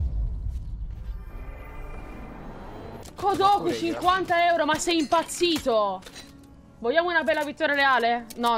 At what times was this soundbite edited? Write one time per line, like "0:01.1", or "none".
0:03.0

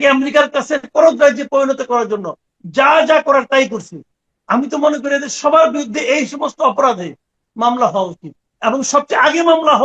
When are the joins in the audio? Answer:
0:00.9

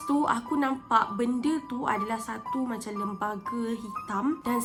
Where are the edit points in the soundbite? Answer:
none

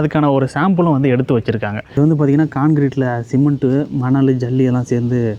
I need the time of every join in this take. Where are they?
0:01.8

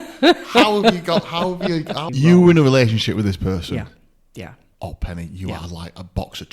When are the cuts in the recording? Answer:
0:02.0

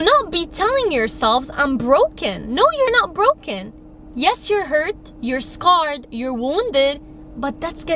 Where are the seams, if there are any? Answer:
none

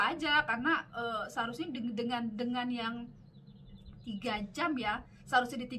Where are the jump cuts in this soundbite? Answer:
none

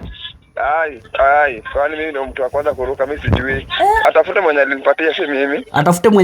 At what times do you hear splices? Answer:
0:04.1

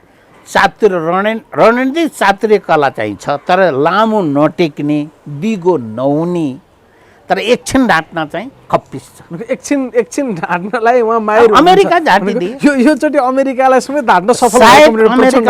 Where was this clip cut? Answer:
none

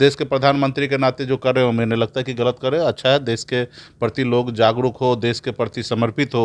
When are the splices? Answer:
none

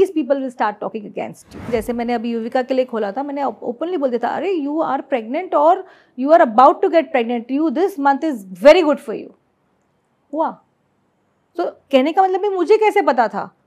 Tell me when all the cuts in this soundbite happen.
0:01.7

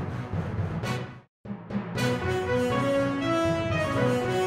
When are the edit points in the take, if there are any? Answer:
none

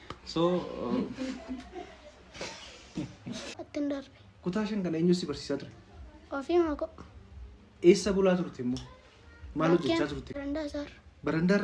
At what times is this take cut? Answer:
0:03.5
0:10.4

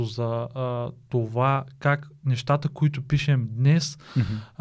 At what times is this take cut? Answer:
none

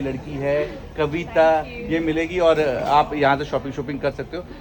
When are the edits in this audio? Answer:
none

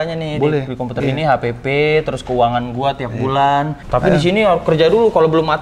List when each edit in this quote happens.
0:03.8

